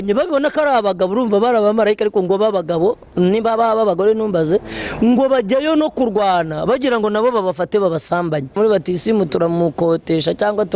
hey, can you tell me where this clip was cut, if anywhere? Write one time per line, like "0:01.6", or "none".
0:08.5